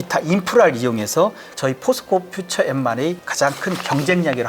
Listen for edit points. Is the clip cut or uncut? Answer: cut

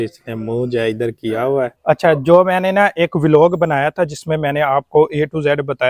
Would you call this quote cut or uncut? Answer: cut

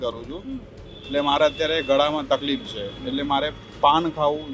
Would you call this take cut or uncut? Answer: uncut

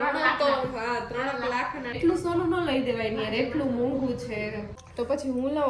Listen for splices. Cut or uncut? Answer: cut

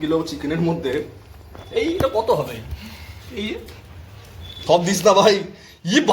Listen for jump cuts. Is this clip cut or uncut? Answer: cut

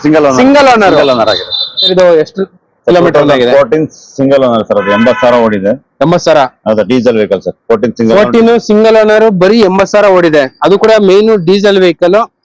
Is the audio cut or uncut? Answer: cut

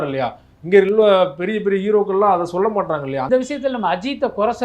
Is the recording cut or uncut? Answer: cut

